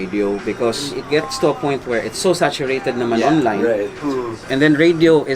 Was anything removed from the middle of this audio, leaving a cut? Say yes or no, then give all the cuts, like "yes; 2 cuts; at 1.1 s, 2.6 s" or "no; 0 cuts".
yes; 2 cuts; at 1.0 s, 4.4 s